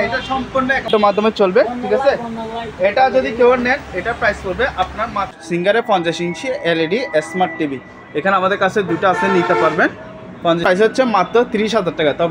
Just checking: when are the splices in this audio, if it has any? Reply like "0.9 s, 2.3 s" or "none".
0.9 s, 5.7 s, 10.8 s